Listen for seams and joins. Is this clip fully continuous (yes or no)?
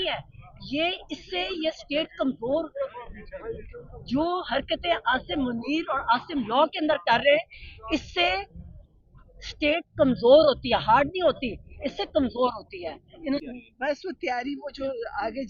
no